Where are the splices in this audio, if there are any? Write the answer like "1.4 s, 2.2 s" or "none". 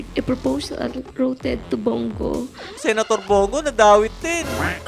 2.7 s